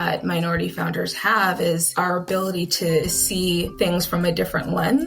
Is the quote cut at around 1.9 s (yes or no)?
yes